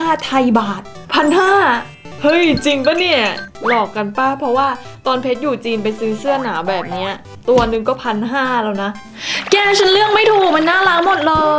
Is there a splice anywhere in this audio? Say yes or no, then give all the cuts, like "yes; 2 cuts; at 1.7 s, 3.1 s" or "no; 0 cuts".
yes; 1 cut; at 9.0 s